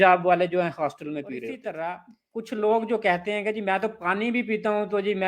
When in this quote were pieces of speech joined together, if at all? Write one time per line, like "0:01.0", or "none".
0:01.7